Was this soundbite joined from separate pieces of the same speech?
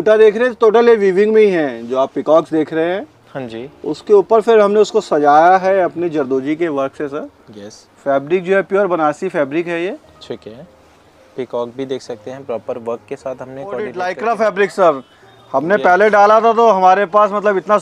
yes; 1 cut; at 13.9 s

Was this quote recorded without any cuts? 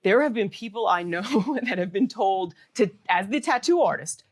yes; 0 cuts

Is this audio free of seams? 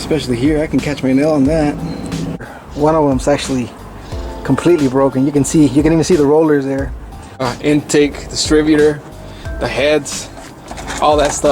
no; 2 cuts; at 2.5 s, 7.5 s

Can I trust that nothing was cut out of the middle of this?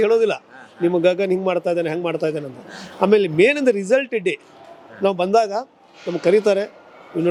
yes; 0 cuts

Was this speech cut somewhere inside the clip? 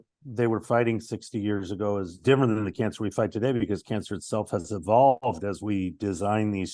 no; 0 cuts

